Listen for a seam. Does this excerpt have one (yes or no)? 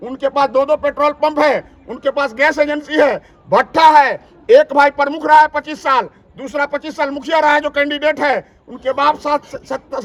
no